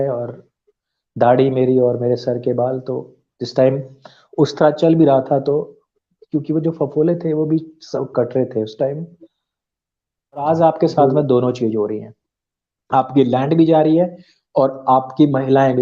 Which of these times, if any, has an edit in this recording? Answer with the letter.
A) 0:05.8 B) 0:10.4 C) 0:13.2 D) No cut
B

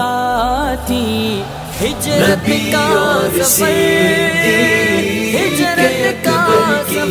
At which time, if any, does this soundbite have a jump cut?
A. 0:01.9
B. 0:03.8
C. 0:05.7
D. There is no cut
D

